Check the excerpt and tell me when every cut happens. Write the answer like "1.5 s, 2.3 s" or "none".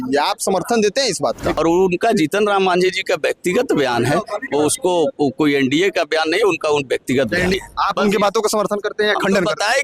1.5 s, 7.5 s